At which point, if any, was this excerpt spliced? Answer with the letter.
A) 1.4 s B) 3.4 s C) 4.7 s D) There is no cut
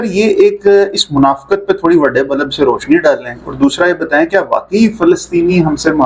D